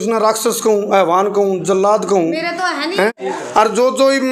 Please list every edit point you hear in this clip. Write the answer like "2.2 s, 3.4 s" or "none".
3.2 s